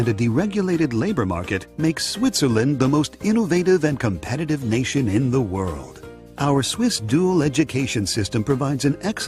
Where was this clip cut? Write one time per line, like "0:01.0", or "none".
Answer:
0:07.3